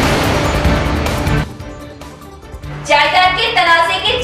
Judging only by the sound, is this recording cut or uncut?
cut